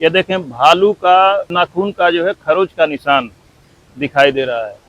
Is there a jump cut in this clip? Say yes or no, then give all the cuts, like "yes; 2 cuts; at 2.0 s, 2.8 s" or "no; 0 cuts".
yes; 1 cut; at 1.5 s